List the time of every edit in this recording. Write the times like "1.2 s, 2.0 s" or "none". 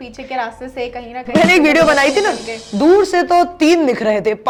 none